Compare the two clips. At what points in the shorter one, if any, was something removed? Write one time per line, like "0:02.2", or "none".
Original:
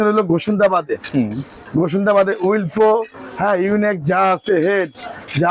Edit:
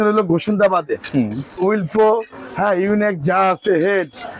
0:01.5